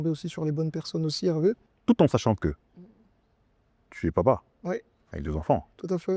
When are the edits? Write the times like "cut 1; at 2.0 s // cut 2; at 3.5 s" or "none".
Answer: cut 1; at 1.7 s